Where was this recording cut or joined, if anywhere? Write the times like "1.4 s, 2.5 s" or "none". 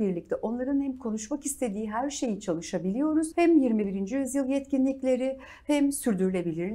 3.3 s